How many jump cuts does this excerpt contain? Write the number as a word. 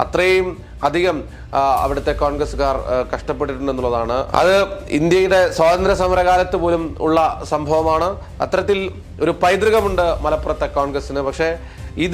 zero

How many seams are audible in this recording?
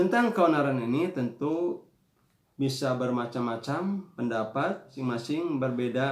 one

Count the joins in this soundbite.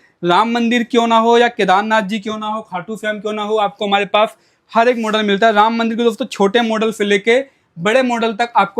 zero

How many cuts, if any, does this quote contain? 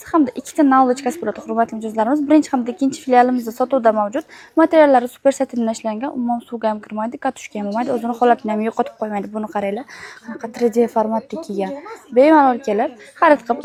zero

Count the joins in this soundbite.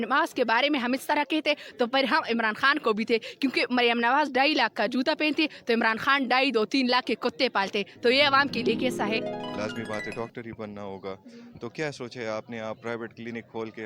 one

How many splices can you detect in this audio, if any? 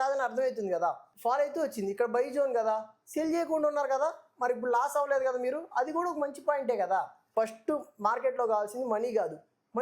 two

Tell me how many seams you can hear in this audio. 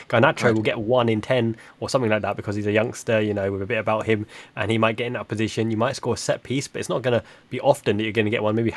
zero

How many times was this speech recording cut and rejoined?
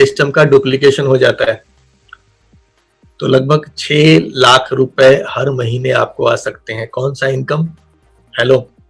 zero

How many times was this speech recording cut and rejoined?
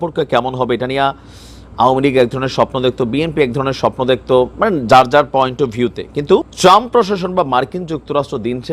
one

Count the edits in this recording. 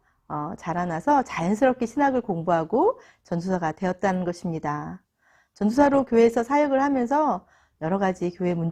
zero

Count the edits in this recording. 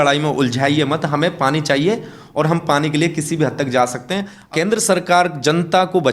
one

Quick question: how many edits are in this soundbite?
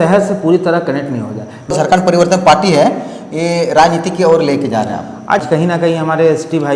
two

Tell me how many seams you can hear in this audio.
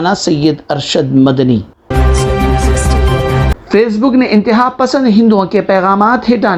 one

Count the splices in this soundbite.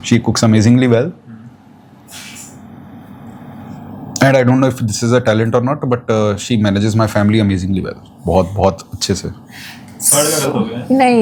zero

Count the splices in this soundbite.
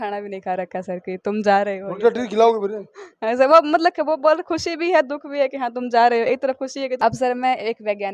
one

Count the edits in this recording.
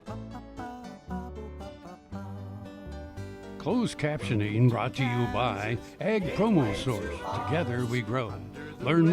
one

